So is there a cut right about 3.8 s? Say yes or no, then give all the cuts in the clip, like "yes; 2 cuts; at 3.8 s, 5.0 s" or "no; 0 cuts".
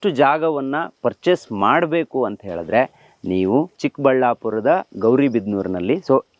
yes; 1 cut; at 3.8 s